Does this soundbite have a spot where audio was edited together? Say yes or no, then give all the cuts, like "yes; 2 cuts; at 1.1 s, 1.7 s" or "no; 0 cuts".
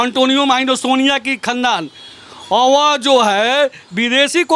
no; 0 cuts